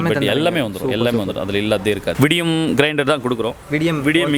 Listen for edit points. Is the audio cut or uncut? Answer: cut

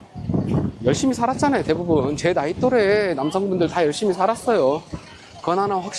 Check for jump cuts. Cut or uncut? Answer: uncut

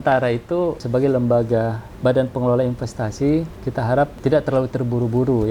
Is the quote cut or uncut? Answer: cut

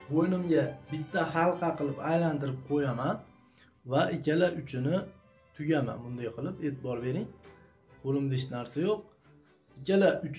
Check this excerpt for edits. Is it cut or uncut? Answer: uncut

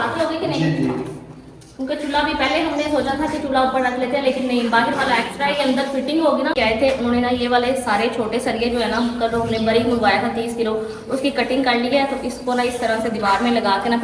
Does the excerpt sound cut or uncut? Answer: uncut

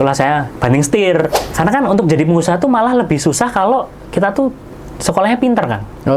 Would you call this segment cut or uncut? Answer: cut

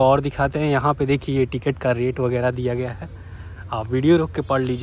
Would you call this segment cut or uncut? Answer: uncut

